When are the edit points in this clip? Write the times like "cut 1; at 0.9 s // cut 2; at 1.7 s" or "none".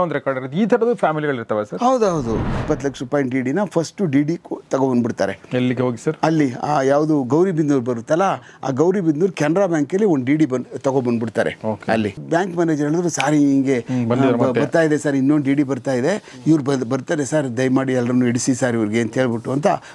cut 1; at 2.5 s // cut 2; at 12.2 s